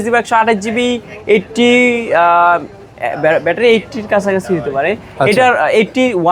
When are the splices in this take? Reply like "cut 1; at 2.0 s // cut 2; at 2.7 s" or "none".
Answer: none